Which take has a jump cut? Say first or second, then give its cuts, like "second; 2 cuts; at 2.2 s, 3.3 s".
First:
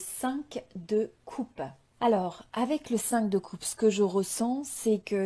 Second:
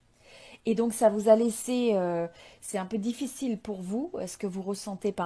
first; 1 cut; at 1.8 s